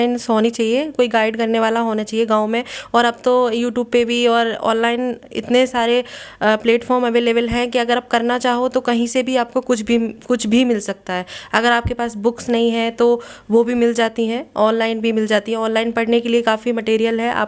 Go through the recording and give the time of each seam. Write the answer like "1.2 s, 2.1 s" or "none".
none

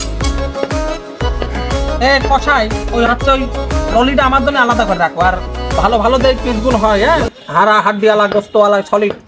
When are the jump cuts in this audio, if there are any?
none

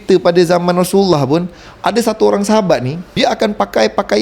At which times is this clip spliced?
3.0 s

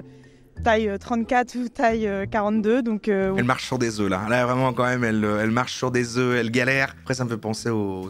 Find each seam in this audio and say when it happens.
3.4 s, 7.0 s

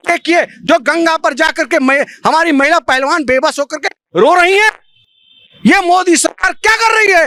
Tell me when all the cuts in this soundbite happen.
none

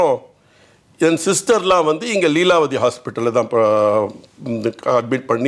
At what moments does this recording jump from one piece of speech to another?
none

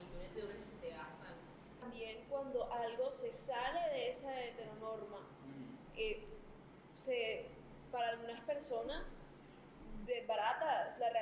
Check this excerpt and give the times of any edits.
1.8 s

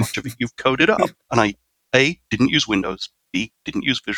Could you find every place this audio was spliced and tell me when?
1.2 s, 3.1 s

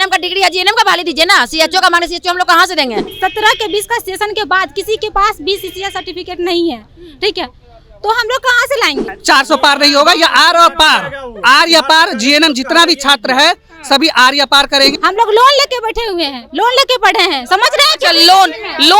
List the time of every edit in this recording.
3.1 s, 9.1 s, 15.0 s

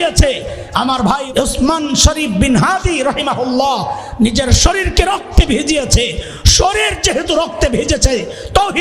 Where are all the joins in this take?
1.2 s

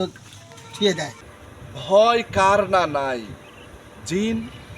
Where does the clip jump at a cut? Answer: 1.2 s

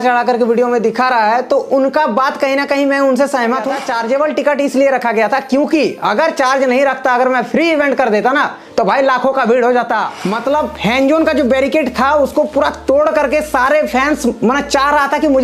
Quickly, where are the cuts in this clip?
3.8 s, 10.2 s

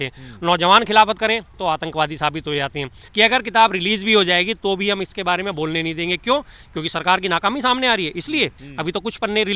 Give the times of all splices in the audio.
3.0 s, 8.6 s

